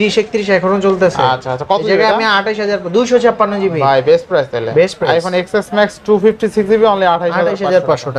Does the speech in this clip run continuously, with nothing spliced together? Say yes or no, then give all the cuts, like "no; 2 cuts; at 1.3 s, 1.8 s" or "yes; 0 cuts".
yes; 0 cuts